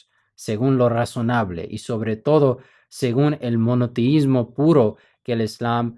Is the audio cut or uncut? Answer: uncut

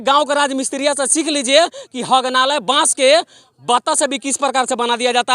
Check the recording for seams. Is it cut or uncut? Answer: uncut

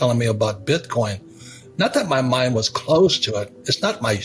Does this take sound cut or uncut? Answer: uncut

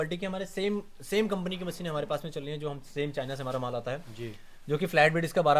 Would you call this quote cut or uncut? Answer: uncut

